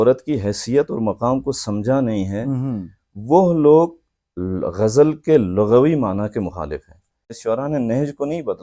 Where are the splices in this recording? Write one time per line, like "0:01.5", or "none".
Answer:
0:07.4